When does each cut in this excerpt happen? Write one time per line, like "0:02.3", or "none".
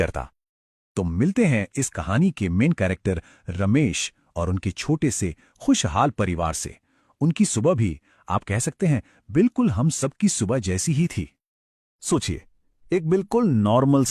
0:02.5

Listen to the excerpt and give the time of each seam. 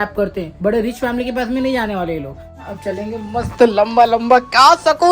0:02.6

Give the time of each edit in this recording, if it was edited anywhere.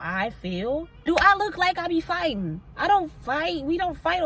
0:00.9

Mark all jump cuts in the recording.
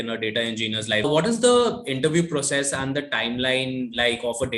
0:01.0

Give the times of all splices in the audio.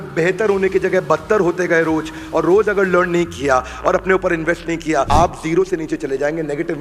0:05.1

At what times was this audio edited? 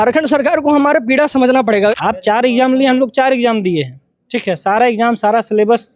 0:02.0

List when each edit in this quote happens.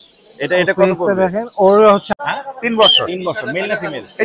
0:02.1

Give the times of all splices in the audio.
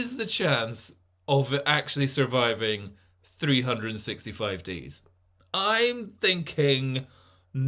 none

